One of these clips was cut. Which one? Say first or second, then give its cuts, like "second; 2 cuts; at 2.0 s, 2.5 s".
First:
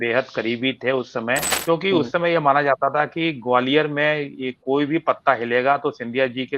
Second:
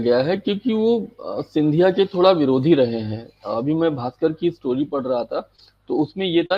first; 1 cut; at 1.5 s